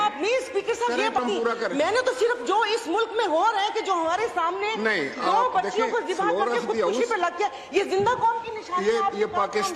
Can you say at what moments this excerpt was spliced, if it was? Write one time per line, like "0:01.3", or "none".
0:01.2

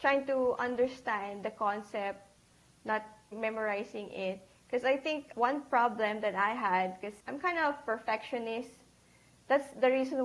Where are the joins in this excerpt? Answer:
0:03.3
0:05.3
0:07.1

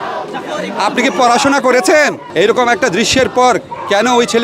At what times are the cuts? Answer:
0:02.2

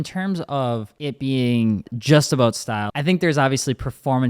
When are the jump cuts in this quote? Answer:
0:00.9
0:01.9
0:02.9

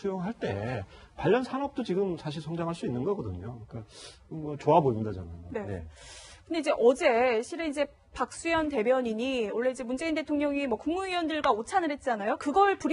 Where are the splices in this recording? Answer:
0:02.3

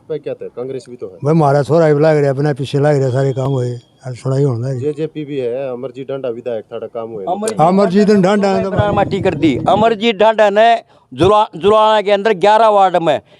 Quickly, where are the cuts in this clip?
none

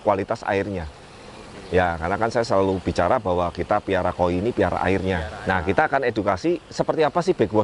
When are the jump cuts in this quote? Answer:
0:05.3

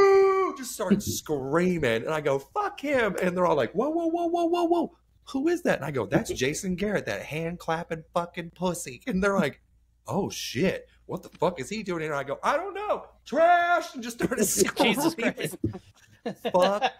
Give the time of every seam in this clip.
none

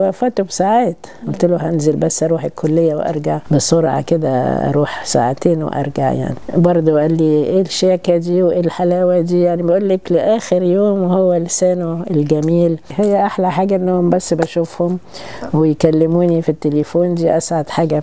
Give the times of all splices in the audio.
0:03.4
0:06.4
0:12.9

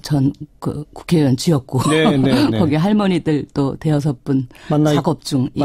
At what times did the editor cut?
0:01.2

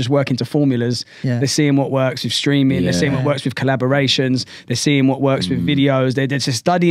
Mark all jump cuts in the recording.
none

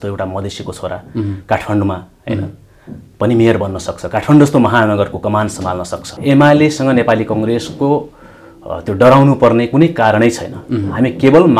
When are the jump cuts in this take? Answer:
0:06.1

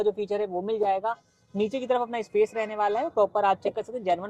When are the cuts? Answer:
none

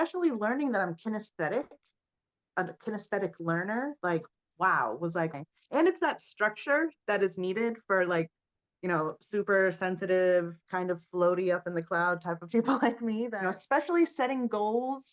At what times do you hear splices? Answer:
0:05.3
0:13.3

